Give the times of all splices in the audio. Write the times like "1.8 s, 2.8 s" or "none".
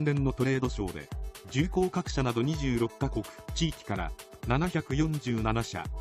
none

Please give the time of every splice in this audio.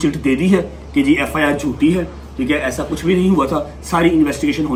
none

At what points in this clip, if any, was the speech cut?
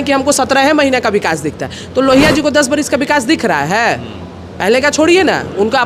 none

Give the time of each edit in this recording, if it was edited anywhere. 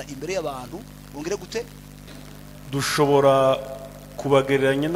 2.0 s

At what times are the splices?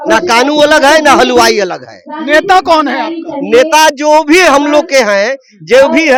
none

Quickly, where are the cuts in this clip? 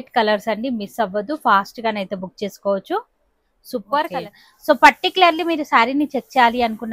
4.3 s

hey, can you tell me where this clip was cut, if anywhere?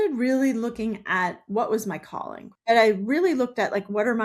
2.4 s

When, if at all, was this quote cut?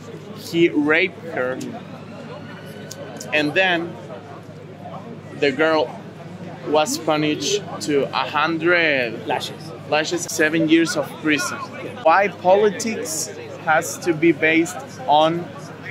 10.3 s, 11.9 s

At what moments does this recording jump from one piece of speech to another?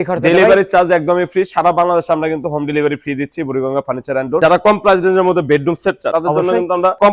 4.4 s

